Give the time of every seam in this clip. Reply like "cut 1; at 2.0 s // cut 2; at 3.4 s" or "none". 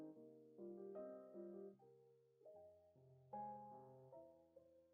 none